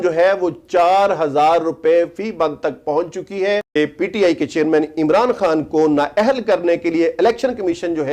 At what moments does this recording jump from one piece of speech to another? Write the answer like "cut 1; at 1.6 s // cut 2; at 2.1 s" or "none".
cut 1; at 3.7 s